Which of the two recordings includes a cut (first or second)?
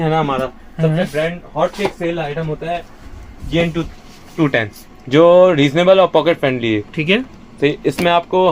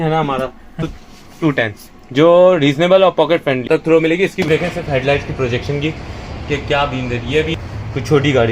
second